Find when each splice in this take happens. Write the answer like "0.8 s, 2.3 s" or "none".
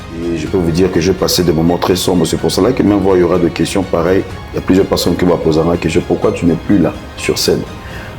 4.4 s